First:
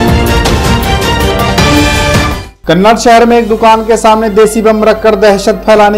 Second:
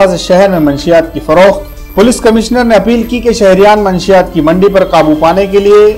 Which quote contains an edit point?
first; 1 cut; at 2.2 s

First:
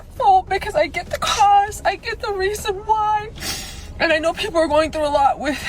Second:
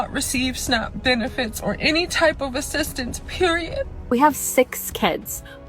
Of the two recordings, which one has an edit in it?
second; 1 cut; at 4.0 s

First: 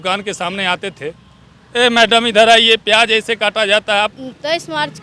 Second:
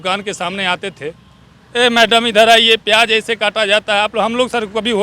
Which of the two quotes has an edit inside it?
first; 1 cut; at 4.1 s

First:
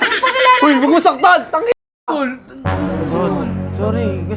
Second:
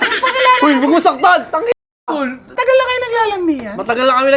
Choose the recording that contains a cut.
second; 1 cut; at 2.6 s

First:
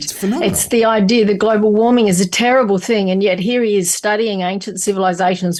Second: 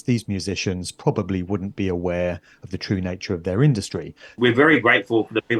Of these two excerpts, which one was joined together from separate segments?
second; 1 cut; at 4.4 s

